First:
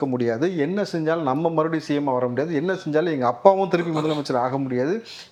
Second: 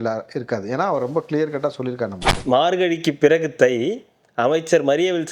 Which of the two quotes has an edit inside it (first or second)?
second